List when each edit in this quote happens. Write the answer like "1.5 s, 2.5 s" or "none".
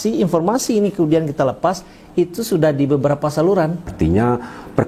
3.9 s